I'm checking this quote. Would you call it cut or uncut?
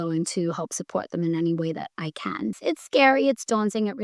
cut